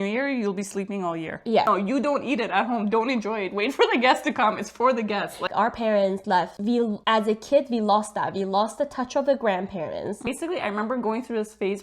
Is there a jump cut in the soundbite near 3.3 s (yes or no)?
no